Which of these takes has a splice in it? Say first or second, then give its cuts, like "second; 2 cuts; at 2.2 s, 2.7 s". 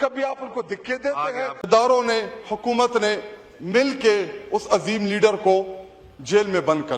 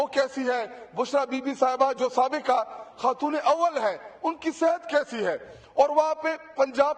first; 1 cut; at 1.6 s